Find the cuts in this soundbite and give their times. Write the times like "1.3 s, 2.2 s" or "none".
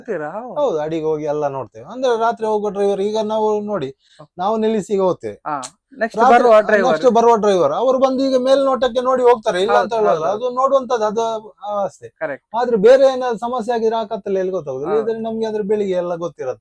none